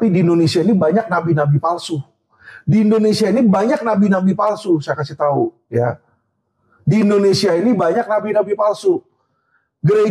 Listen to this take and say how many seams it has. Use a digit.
0